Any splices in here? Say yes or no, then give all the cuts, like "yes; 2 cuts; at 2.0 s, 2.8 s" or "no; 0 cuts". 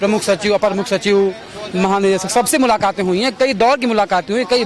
no; 0 cuts